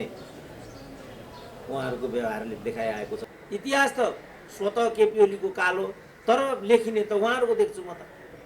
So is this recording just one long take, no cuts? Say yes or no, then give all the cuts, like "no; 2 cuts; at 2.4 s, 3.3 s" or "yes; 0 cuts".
no; 1 cut; at 3.3 s